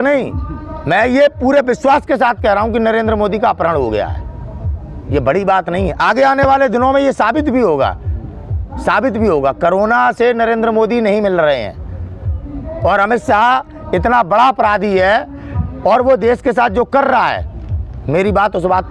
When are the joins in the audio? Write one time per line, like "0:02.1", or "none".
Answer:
none